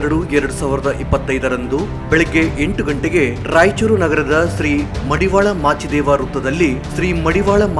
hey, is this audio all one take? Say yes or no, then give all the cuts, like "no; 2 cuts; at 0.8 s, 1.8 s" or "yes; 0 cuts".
yes; 0 cuts